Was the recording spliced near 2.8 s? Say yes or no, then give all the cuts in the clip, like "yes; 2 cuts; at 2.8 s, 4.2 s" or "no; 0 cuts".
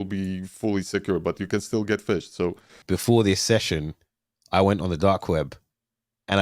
yes; 1 cut; at 2.8 s